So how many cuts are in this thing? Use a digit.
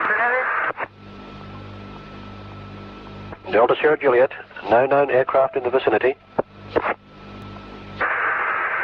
1